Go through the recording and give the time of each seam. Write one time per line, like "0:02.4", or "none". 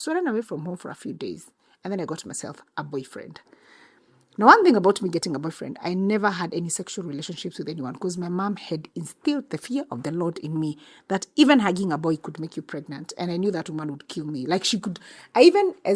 none